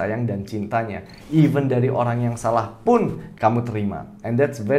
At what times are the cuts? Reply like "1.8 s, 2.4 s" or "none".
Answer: 3.3 s